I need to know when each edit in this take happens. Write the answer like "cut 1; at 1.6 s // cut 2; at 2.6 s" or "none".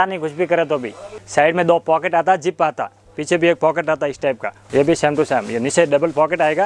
cut 1; at 1.2 s // cut 2; at 4.5 s